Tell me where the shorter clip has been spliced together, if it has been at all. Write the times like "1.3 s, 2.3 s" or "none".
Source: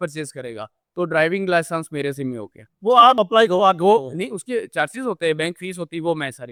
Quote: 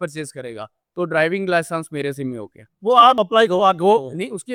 none